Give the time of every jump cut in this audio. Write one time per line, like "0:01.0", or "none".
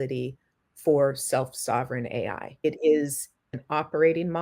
0:02.4
0:03.4

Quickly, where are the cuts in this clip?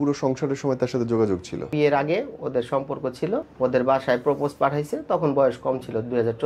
0:01.7
0:03.5

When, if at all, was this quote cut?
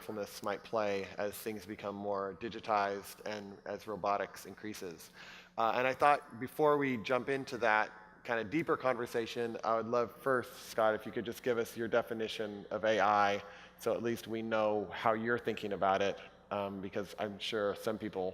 0:15.4

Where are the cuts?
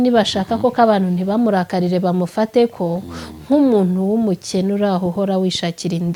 none

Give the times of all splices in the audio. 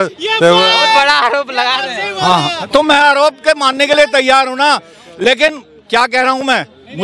none

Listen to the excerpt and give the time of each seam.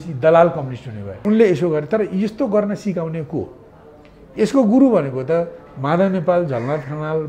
0:01.2

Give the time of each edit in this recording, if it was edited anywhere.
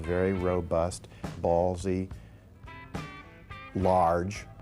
0:01.3

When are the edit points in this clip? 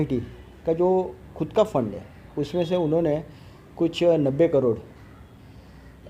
none

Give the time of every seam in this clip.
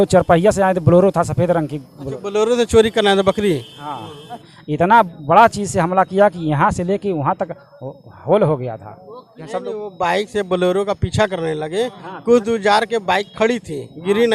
0:04.6
0:09.4

